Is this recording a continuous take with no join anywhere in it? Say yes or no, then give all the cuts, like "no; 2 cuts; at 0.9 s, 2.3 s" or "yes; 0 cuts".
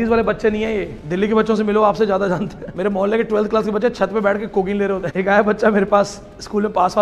no; 3 cuts; at 1.0 s, 2.6 s, 5.1 s